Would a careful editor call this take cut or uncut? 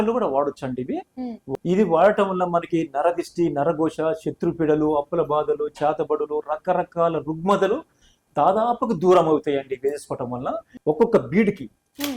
cut